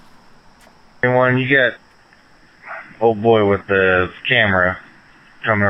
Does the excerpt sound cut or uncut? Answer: cut